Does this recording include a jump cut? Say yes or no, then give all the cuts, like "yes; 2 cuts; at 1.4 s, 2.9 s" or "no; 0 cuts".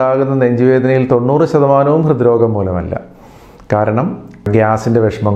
no; 0 cuts